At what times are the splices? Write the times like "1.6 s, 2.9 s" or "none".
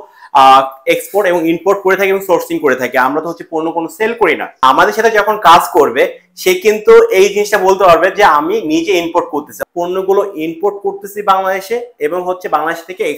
4.6 s, 9.5 s